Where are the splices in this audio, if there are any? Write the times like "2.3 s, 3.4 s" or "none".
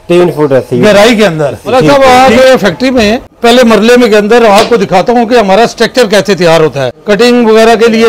1.6 s, 3.3 s, 6.9 s